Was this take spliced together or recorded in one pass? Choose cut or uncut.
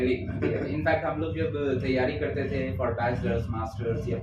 uncut